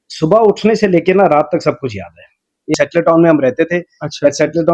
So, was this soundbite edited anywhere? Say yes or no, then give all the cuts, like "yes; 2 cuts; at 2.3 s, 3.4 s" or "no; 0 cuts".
yes; 1 cut; at 2.7 s